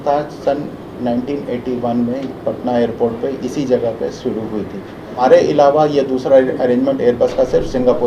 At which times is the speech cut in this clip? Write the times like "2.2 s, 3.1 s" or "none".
5.2 s